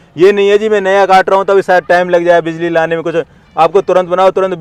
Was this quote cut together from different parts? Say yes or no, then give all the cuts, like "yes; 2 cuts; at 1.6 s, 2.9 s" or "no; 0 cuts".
no; 0 cuts